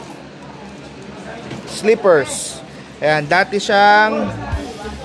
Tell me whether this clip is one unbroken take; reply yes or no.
yes